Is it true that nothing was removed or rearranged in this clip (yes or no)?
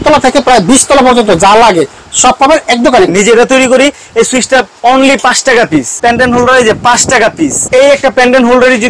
no